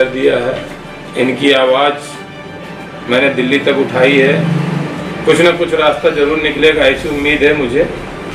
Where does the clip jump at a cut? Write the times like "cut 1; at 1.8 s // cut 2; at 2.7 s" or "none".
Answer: none